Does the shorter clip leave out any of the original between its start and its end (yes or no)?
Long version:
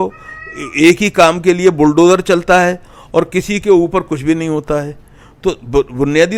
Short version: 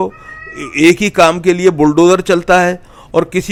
no